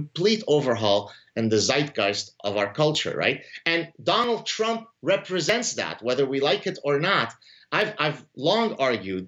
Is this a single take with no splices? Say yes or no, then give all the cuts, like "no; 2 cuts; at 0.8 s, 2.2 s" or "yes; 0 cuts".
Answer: yes; 0 cuts